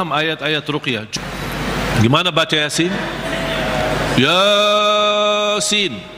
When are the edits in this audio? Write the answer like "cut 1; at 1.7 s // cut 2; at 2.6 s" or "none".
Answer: cut 1; at 1.1 s